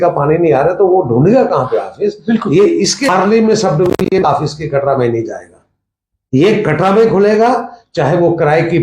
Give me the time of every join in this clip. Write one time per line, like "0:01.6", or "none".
0:03.1